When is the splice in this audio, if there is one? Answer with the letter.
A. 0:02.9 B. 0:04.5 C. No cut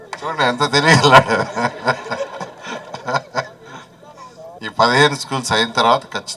B